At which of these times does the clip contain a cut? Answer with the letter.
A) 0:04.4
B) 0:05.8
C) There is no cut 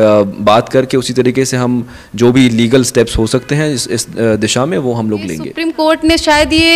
B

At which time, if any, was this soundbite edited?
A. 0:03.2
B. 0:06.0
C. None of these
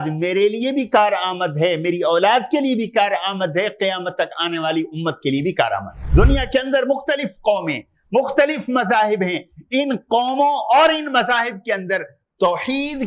B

